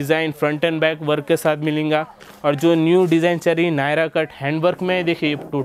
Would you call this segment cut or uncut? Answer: uncut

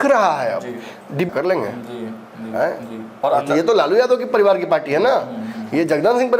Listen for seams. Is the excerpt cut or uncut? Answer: cut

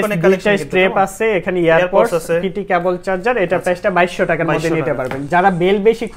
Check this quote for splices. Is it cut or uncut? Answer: uncut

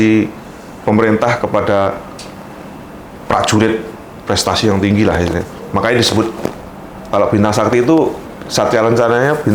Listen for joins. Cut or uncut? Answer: uncut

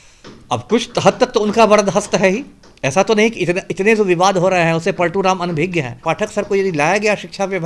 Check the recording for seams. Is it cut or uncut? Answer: cut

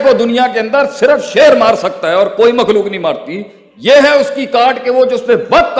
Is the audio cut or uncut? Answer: uncut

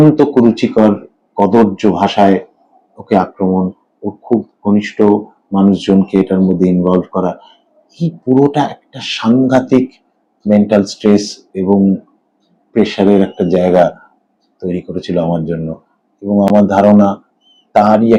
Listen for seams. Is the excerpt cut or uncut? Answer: uncut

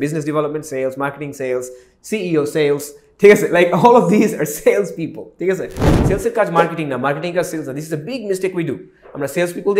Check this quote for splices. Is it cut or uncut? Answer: cut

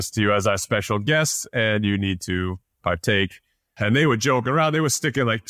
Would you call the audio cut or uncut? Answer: uncut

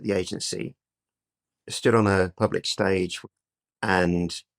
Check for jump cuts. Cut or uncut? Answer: cut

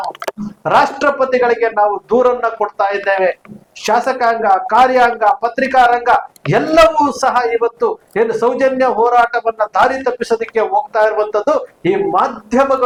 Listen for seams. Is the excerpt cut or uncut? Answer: uncut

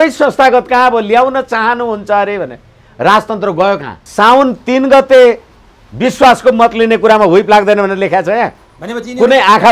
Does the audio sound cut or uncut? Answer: cut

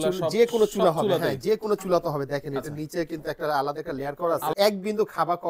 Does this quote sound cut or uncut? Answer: cut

